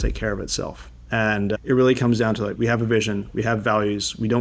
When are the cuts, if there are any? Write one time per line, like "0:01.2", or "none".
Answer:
0:01.6
0:02.5